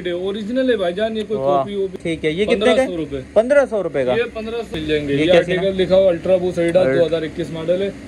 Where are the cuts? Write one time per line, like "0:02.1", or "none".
0:02.0
0:04.7